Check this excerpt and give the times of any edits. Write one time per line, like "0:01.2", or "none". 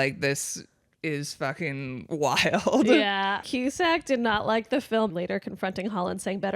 0:03.4
0:05.1